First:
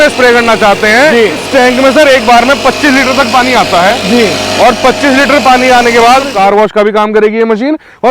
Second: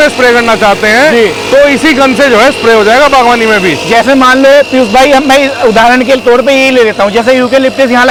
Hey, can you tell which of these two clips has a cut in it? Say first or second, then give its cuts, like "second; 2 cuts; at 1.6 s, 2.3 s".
first; 2 cuts; at 1.4 s, 6.3 s